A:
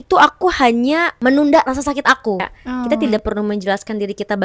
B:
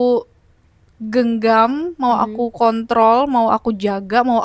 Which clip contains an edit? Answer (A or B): A